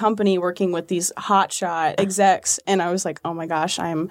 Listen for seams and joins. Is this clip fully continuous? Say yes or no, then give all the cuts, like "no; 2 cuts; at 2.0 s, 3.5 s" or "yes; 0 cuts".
no; 1 cut; at 2.0 s